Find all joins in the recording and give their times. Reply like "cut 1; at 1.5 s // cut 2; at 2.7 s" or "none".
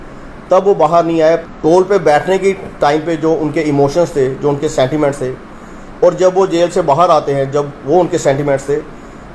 cut 1; at 1.4 s